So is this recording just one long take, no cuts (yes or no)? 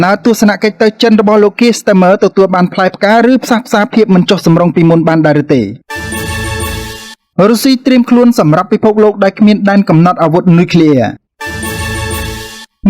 no